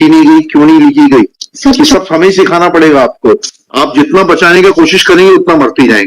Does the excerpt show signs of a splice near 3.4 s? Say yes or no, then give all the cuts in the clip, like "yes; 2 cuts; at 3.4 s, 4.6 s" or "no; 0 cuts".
yes; 1 cut; at 3.4 s